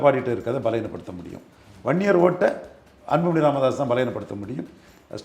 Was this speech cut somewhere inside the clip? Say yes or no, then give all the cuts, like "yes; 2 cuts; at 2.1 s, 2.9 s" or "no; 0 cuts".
yes; 1 cut; at 2.8 s